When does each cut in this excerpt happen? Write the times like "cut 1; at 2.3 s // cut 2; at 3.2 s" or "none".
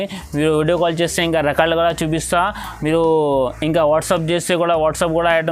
none

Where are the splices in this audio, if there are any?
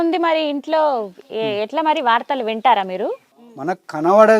cut 1; at 3.3 s

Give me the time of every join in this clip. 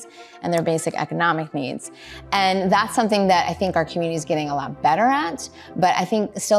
none

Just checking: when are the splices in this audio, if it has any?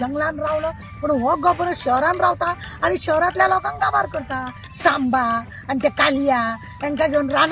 cut 1; at 4.6 s

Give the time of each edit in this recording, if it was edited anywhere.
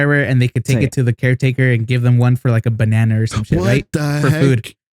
none

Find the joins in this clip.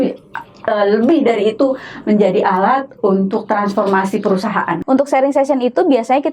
cut 1; at 4.8 s

